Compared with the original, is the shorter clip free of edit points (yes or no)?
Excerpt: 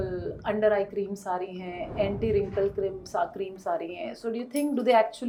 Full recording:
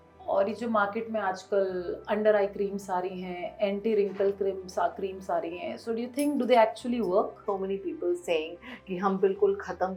yes